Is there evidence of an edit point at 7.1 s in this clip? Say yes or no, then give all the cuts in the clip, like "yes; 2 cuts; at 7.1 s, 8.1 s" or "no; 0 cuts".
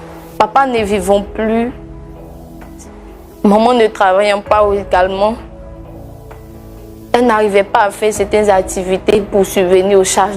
yes; 2 cuts; at 5.4 s, 7.1 s